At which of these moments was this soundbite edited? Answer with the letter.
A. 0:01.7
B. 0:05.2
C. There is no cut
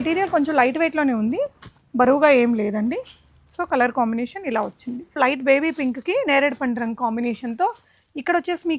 B